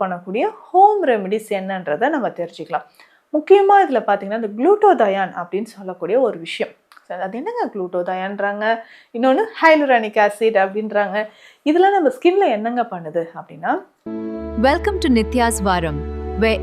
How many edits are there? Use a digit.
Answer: 1